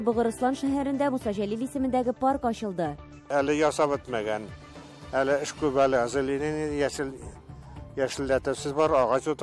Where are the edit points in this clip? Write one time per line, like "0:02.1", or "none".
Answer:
none

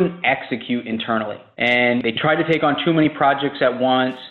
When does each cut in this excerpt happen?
0:01.4

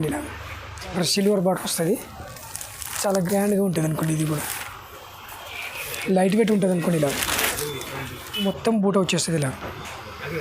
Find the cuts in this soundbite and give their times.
0:01.0
0:08.4

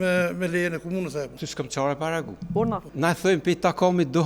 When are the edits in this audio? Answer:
0:01.4
0:02.9

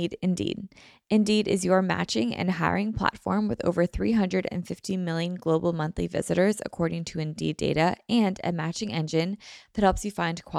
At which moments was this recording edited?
none

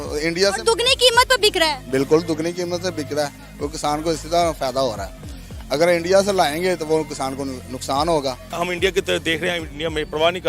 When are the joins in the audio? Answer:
0:08.5

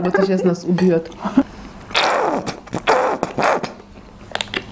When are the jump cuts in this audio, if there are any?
0:01.4

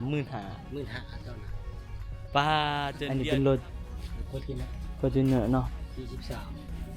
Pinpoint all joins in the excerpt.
0:03.0

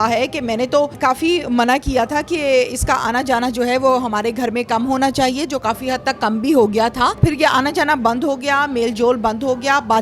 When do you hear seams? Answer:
0:01.0
0:07.2

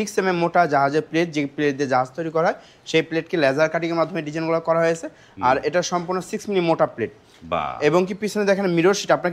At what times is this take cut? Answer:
none

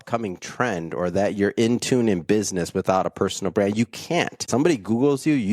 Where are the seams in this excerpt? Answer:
0:04.5

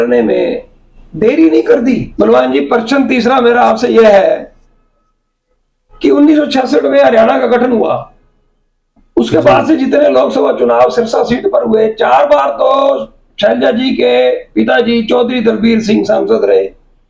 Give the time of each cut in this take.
0:02.1

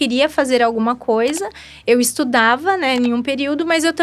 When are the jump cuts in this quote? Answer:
none

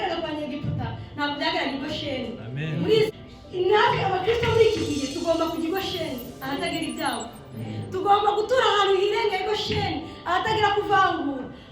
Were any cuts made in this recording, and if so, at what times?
0:03.1

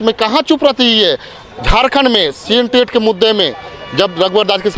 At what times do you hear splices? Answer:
none

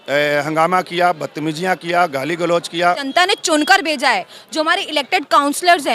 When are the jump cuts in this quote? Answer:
0:03.0

